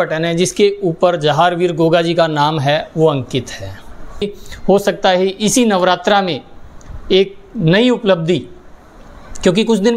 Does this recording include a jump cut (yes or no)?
yes